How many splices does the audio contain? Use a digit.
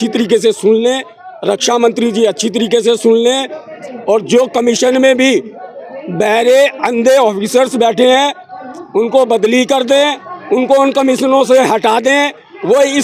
0